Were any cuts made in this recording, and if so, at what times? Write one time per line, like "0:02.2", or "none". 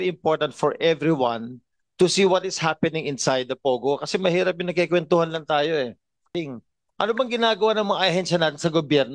0:06.3